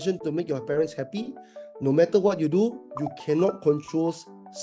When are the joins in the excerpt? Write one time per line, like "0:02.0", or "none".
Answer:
none